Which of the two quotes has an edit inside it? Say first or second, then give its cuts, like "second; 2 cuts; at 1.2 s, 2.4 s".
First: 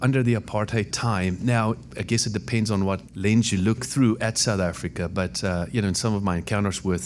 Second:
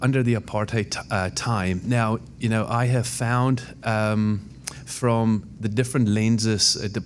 first; 4 cuts; at 0.9 s, 1.9 s, 3.1 s, 3.9 s